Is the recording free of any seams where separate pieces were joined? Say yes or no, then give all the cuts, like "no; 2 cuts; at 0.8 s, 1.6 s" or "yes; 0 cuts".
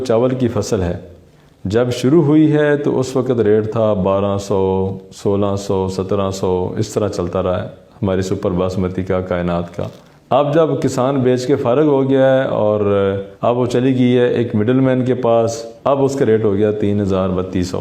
yes; 0 cuts